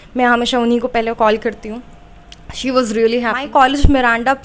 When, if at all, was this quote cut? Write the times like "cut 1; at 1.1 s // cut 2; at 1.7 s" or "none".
cut 1; at 3.4 s